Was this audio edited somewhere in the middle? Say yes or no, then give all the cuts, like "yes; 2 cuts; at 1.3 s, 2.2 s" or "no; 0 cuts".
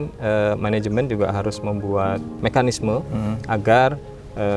yes; 1 cut; at 2.3 s